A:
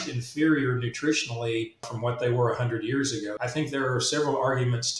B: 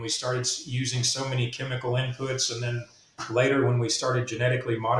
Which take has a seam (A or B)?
A